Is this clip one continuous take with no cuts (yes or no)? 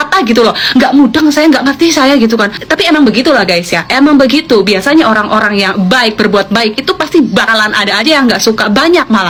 yes